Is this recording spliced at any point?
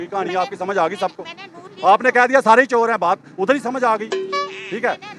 no; 0 cuts

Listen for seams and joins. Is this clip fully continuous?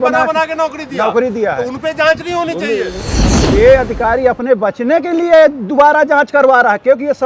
no; 1 cut; at 3.1 s

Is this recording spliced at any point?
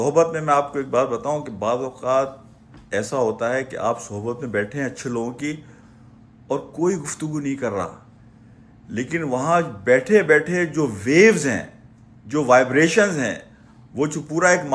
no; 0 cuts

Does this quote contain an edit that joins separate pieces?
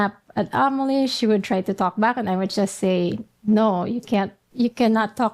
yes; 1 cut; at 4.4 s

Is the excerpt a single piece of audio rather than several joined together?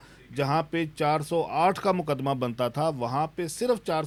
yes; 0 cuts

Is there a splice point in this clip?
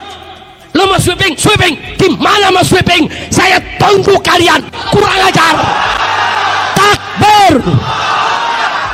no; 0 cuts

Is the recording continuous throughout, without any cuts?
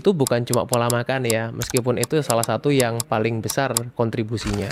yes; 0 cuts

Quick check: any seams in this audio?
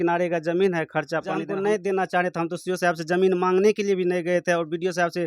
yes; 1 cut; at 1.5 s

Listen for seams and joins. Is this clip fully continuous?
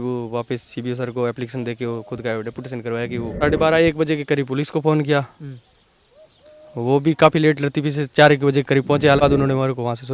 no; 2 cuts; at 3.4 s, 9.2 s

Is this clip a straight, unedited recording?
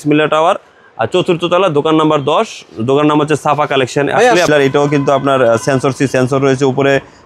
no; 1 cut; at 4.5 s

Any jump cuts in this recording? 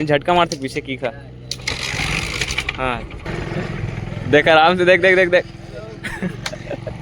yes; 1 cut; at 3.4 s

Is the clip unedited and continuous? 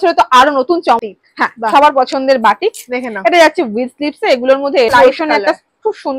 no; 2 cuts; at 1.0 s, 4.9 s

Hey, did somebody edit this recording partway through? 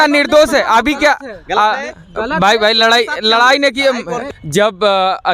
yes; 1 cut; at 4.2 s

